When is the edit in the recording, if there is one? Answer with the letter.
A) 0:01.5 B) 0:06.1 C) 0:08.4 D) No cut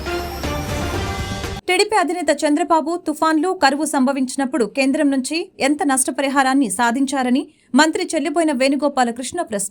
A